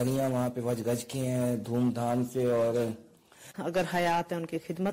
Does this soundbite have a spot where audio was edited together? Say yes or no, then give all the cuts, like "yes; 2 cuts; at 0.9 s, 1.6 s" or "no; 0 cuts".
yes; 1 cut; at 3.5 s